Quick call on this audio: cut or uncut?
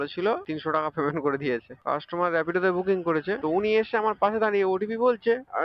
cut